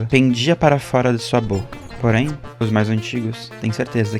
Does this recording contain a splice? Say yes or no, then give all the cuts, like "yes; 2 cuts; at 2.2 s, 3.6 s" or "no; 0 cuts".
yes; 1 cut; at 1.8 s